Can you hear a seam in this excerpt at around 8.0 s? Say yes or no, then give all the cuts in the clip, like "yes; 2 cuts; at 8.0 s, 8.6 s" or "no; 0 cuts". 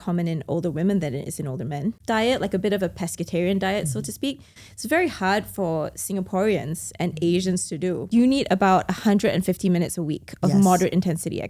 yes; 2 cuts; at 2.0 s, 8.0 s